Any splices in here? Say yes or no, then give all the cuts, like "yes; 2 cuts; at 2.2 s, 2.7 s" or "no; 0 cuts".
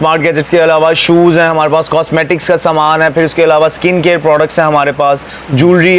no; 0 cuts